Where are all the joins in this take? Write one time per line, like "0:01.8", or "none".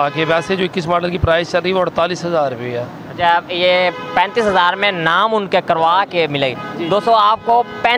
none

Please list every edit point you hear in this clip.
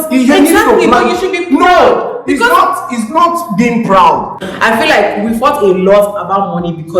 0:04.4

